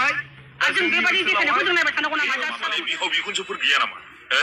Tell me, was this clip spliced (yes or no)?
yes